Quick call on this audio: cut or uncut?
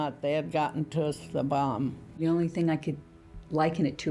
cut